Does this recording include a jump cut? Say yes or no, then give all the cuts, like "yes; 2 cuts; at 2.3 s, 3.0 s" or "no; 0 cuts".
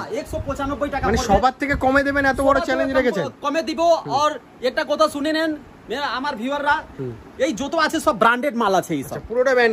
no; 0 cuts